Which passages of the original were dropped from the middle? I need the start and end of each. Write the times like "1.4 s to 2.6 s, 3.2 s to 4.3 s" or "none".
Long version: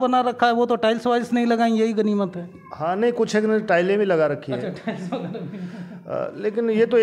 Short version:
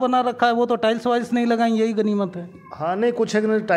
none